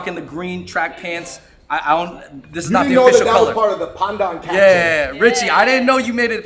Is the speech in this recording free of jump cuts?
yes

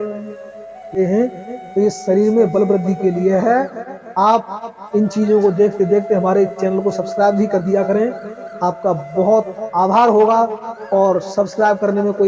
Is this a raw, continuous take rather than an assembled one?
no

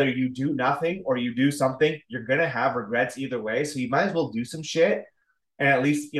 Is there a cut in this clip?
no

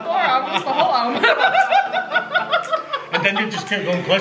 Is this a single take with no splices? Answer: yes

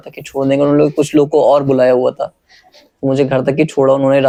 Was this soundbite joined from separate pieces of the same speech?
no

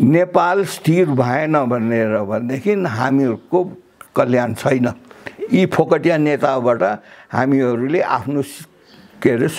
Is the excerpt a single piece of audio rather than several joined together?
yes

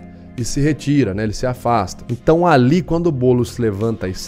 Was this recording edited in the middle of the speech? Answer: yes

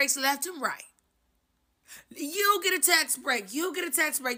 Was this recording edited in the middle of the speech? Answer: no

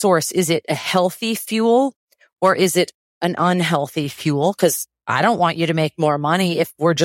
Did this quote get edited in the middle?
no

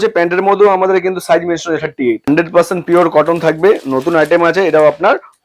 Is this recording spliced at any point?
yes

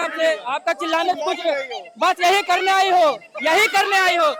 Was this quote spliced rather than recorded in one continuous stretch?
no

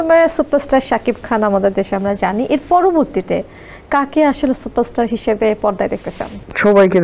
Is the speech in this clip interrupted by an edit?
no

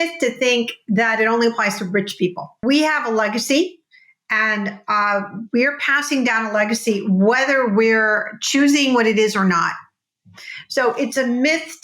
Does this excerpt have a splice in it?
yes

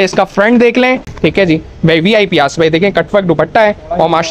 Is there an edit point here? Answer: yes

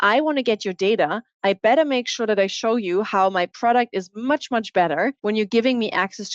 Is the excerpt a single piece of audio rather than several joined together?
no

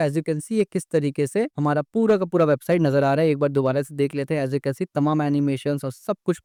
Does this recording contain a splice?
no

